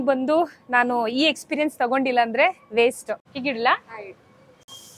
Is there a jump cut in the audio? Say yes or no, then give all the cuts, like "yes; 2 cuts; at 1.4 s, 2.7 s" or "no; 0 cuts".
yes; 1 cut; at 3.2 s